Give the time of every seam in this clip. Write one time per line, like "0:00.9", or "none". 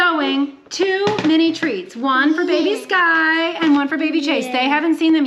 none